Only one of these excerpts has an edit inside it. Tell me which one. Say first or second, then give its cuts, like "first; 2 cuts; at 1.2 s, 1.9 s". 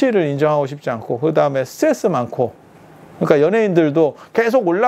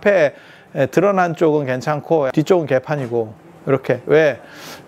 second; 1 cut; at 2.3 s